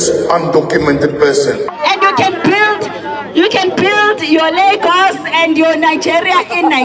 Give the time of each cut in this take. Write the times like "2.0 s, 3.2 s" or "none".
1.8 s